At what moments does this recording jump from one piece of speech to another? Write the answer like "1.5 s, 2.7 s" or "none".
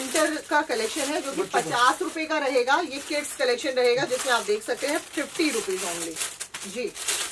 none